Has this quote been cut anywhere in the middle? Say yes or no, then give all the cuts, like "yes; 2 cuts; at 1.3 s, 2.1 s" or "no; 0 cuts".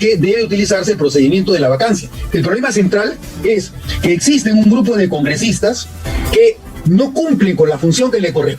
yes; 1 cut; at 2.1 s